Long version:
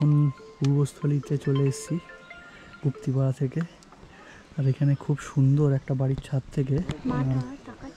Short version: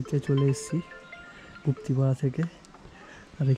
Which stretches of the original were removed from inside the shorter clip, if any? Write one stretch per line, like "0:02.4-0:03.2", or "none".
none